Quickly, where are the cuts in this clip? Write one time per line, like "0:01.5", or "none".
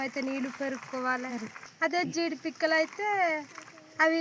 0:01.5